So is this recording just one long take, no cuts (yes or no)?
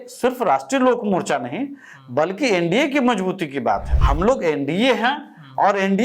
no